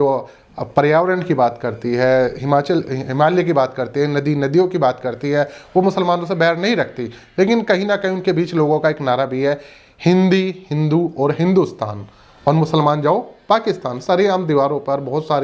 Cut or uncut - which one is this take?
uncut